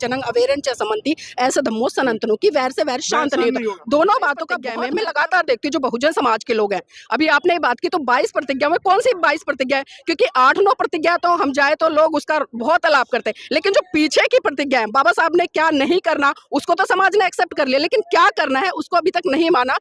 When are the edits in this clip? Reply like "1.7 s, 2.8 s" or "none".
4.6 s

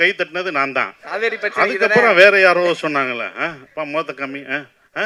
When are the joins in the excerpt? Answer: none

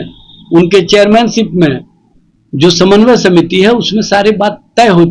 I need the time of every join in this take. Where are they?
none

